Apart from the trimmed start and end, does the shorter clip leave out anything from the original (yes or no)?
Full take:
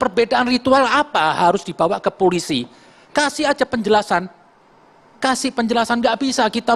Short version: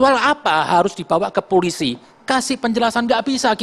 yes